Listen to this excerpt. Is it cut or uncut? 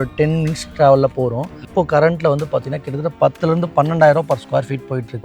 cut